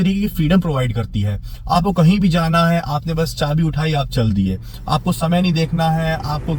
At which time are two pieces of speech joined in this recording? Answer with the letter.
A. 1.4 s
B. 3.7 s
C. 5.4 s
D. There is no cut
D